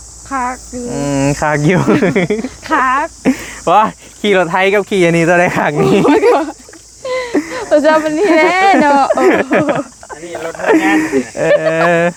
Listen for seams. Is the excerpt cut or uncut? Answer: uncut